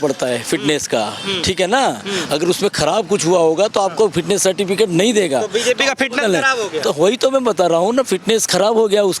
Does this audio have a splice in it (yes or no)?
no